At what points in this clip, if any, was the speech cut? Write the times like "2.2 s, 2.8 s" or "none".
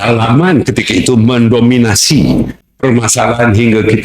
2.6 s